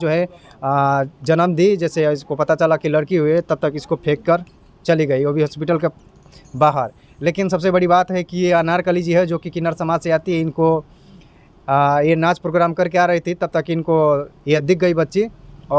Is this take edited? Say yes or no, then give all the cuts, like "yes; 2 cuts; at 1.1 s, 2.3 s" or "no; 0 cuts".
yes; 1 cut; at 14.6 s